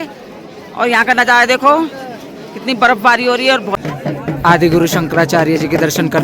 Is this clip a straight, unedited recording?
no; 1 cut; at 3.8 s

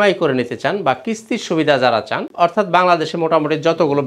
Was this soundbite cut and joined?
no; 0 cuts

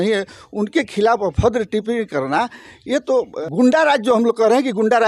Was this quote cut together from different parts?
yes; 1 cut; at 3.4 s

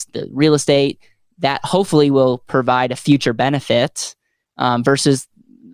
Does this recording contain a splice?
no; 0 cuts

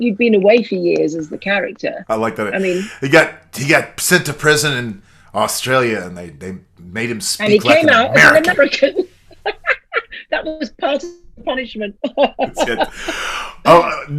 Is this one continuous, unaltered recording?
yes; 0 cuts

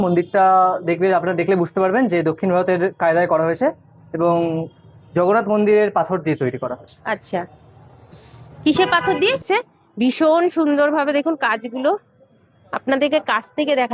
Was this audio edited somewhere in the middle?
yes; 1 cut; at 9.5 s

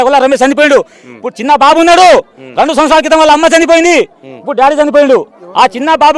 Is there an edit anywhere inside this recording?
no; 0 cuts

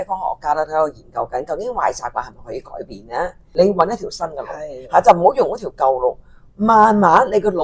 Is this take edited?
yes; 1 cut; at 3.4 s

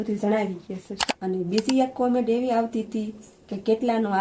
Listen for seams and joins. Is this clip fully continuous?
no; 1 cut; at 1.0 s

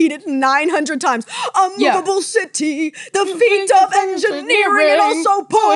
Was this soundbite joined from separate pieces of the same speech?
no; 0 cuts

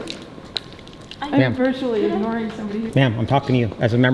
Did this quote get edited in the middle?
yes; 1 cut; at 2.8 s

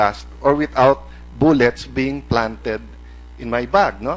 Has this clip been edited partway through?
no; 0 cuts

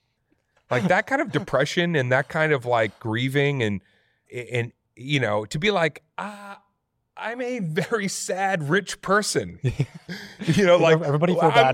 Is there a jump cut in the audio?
no; 0 cuts

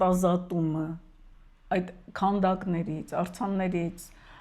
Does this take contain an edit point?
no; 0 cuts

